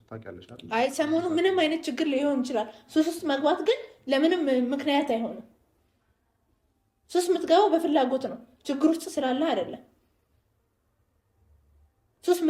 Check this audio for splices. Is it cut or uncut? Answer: uncut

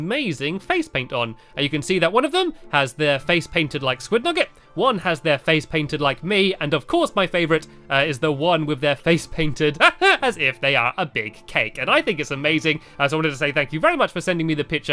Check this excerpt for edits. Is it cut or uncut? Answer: uncut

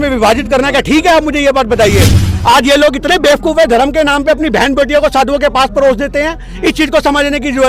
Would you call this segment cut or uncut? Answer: cut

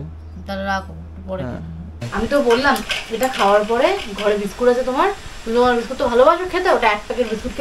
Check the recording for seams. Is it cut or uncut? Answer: cut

